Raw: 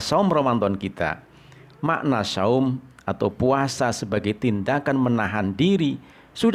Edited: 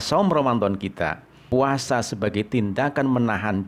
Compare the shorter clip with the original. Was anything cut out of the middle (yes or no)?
yes